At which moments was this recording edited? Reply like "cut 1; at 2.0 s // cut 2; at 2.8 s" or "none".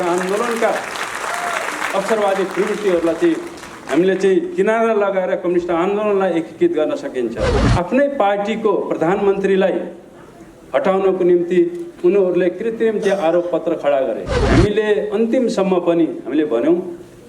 cut 1; at 7.6 s // cut 2; at 14.3 s